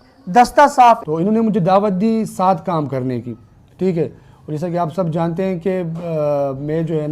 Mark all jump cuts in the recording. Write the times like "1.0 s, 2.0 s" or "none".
1.0 s